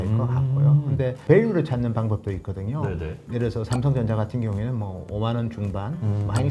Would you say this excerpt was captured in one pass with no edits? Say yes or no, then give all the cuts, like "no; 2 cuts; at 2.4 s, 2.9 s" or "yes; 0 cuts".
no; 2 cuts; at 1.2 s, 3.2 s